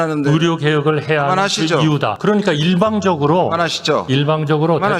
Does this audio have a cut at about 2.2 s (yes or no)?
yes